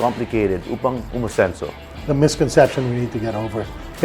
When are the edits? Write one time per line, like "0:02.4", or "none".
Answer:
0:01.8